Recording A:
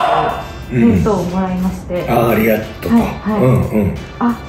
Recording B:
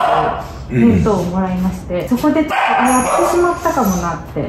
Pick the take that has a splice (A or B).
B